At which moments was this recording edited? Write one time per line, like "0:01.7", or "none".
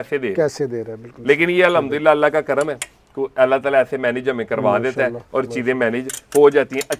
none